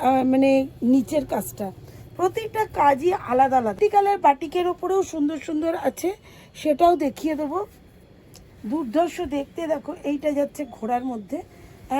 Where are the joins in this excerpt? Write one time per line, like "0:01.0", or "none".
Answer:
0:03.8
0:08.5